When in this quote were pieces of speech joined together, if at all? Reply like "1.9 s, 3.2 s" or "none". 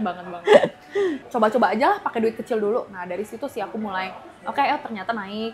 1.2 s